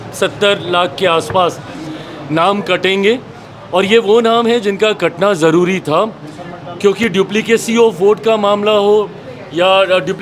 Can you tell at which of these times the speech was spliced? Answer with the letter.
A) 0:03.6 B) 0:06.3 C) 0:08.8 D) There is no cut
D